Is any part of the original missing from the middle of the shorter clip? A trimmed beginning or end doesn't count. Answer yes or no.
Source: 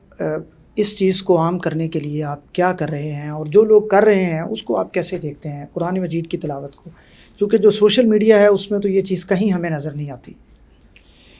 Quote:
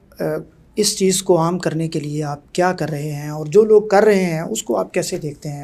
no